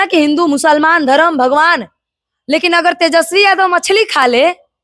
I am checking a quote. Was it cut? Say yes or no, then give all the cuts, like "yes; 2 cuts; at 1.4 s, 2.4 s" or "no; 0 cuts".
no; 0 cuts